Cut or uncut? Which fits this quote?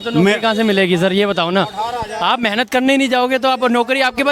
uncut